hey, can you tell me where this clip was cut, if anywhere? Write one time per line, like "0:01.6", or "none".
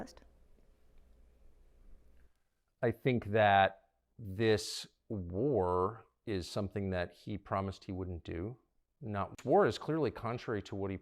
0:09.4